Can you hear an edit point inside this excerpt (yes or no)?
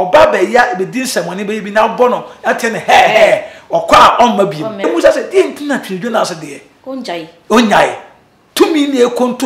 yes